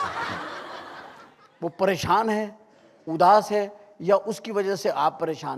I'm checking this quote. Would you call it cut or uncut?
uncut